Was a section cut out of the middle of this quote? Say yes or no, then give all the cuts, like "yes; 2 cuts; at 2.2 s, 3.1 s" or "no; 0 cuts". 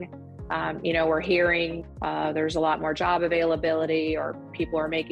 yes; 1 cut; at 1.8 s